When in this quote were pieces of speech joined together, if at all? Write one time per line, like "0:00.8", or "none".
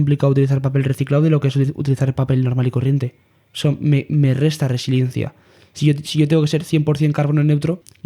none

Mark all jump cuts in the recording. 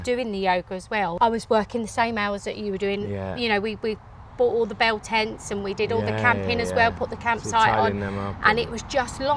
0:01.1

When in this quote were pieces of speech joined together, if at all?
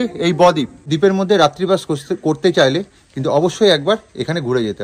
0:00.9

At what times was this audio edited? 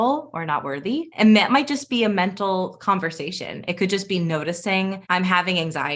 0:01.1
0:05.0

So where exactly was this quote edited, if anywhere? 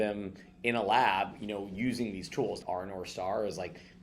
0:02.6

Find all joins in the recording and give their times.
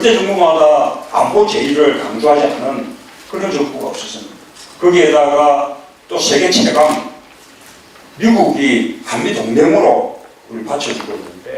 0:09.5

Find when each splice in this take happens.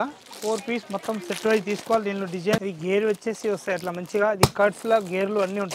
0:02.6

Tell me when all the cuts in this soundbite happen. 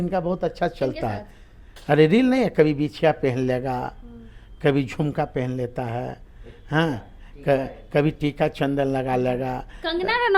none

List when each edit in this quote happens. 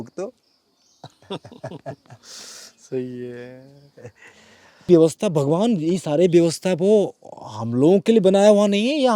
0:04.9

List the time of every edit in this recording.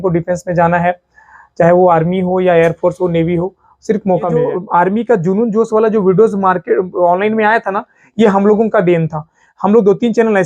0:04.5

